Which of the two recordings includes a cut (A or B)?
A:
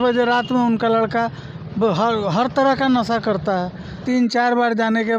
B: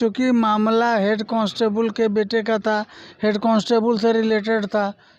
A